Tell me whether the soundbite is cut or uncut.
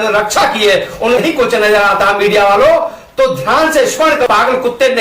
cut